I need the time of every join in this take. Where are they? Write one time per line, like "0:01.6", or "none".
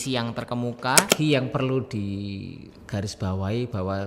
0:01.1